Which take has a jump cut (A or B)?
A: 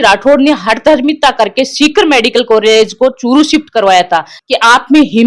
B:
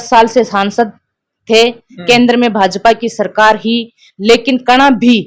A